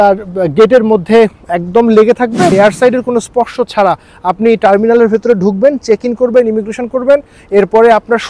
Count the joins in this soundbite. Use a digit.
1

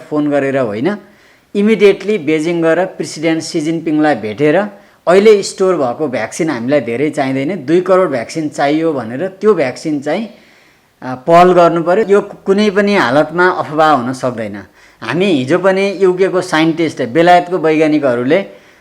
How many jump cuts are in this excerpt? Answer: 1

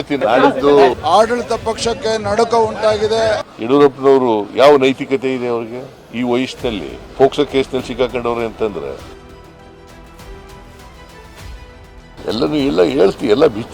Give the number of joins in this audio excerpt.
2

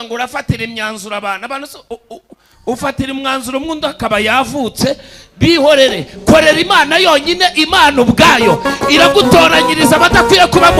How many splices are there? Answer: 0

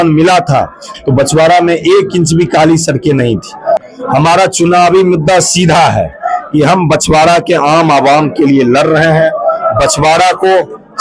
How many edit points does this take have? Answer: 1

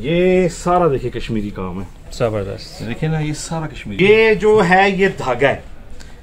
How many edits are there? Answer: 1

